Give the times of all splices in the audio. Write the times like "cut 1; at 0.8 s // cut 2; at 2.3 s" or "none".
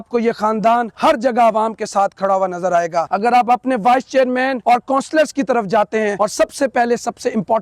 cut 1; at 0.9 s // cut 2; at 3.1 s // cut 3; at 4.6 s // cut 4; at 6.1 s